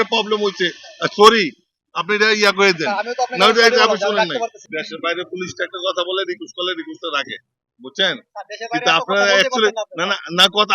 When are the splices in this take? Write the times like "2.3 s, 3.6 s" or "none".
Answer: 4.6 s